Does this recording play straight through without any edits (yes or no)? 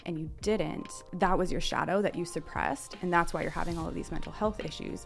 no